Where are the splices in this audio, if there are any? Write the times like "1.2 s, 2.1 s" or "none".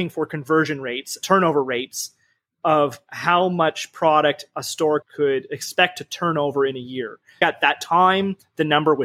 1.1 s, 5.0 s, 7.4 s